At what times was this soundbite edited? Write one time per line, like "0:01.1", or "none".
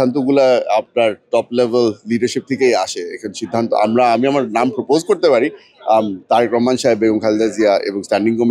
none